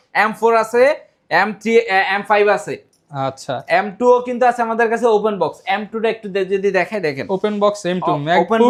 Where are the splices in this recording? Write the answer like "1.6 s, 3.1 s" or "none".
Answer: none